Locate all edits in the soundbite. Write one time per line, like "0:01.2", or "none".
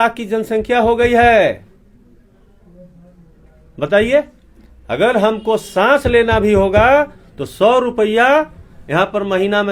none